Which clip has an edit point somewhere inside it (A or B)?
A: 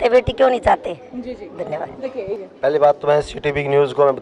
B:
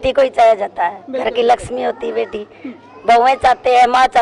A